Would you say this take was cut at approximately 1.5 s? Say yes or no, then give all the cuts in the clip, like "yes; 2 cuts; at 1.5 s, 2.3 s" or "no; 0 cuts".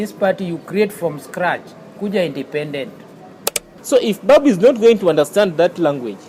no; 1 cut; at 3.7 s